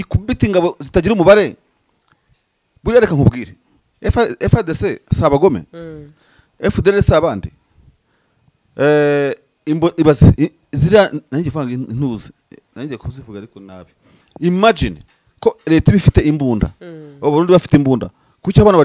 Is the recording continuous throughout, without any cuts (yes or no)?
no